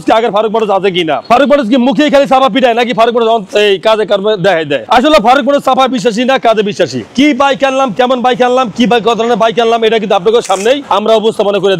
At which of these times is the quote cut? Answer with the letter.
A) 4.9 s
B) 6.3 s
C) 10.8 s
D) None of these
C